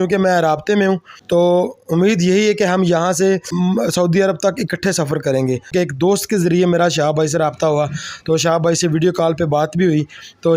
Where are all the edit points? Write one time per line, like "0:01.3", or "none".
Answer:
0:01.1
0:03.5
0:05.7

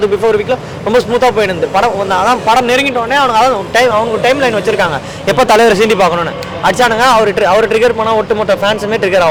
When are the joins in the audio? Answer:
none

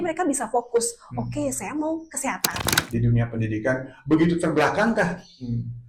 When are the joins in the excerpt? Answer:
0:02.7

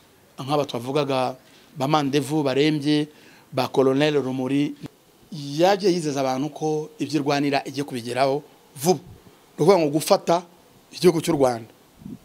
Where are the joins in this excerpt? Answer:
0:04.8

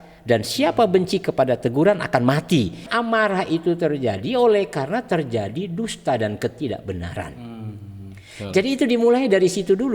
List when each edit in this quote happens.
0:02.9

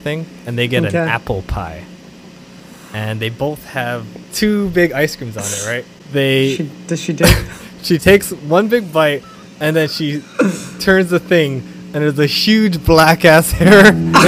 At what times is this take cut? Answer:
0:04.2
0:05.9

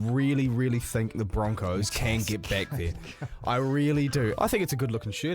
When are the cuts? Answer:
0:01.2
0:04.3

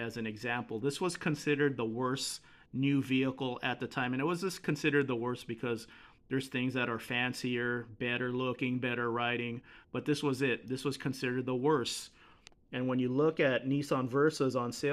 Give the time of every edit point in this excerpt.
none

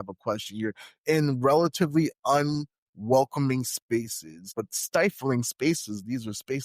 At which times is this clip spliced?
0:04.7

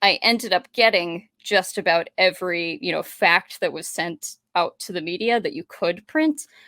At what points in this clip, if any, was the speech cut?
none

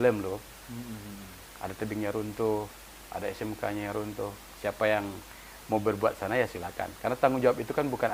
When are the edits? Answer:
none

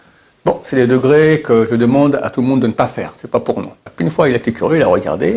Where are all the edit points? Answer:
0:03.9

